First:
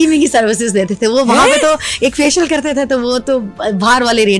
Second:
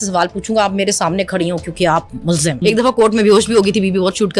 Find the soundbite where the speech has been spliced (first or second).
second